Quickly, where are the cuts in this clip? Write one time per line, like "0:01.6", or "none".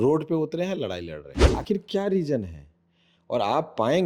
0:01.4